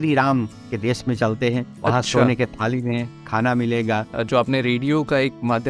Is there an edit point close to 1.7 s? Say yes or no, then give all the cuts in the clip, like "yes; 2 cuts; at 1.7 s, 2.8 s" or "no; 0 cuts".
yes; 2 cuts; at 1.7 s, 4.1 s